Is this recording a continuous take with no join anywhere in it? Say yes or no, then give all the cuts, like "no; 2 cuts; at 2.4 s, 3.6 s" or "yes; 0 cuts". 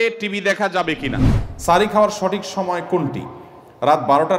no; 1 cut; at 1.4 s